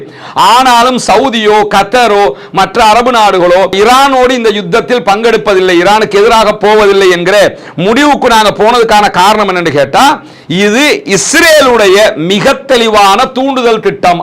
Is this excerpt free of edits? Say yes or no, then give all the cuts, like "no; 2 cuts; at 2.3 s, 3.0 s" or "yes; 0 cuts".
yes; 0 cuts